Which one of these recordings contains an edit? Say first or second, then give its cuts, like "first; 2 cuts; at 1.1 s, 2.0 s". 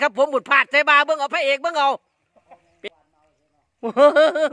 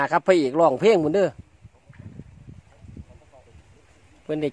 first; 1 cut; at 2.9 s